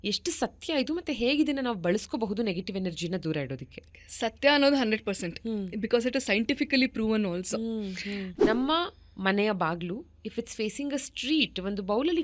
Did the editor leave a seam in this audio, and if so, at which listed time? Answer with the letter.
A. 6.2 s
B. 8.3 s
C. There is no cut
B